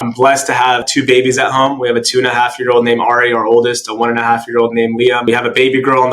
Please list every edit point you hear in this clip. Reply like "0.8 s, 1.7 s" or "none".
none